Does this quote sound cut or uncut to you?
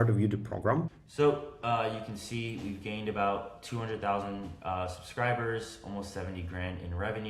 cut